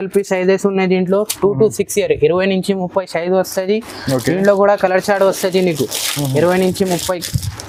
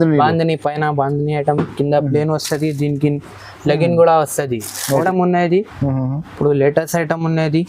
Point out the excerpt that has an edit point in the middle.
second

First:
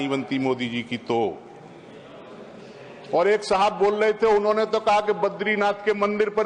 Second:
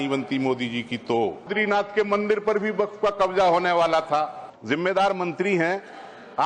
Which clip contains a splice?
second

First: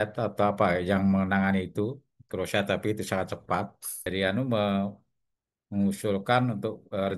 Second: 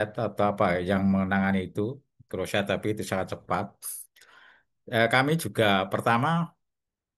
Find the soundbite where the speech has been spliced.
first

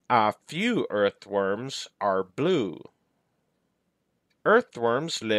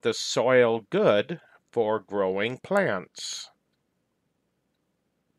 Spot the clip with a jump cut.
first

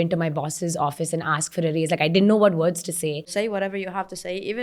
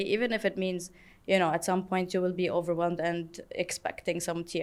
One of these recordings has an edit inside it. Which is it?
first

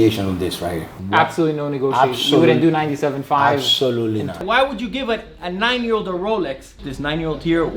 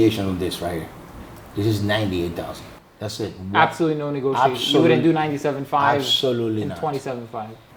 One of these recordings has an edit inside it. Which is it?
first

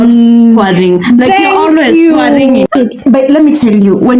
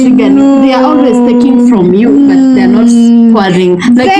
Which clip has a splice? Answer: first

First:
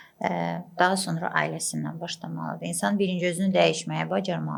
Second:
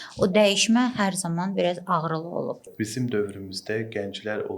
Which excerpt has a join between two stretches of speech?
second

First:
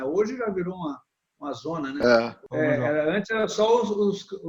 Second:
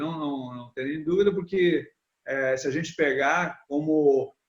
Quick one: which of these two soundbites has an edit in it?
first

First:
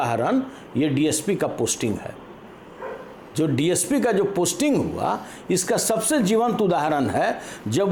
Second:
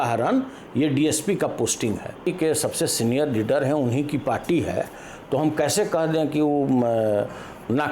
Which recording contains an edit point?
second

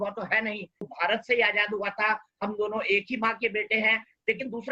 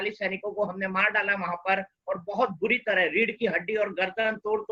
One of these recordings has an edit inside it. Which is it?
first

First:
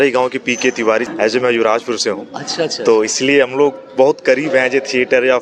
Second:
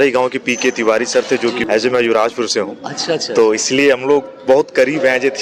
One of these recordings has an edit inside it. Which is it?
first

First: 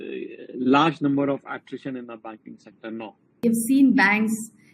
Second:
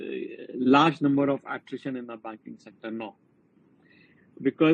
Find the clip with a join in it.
first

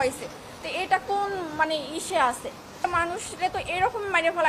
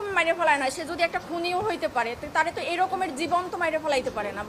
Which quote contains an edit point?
first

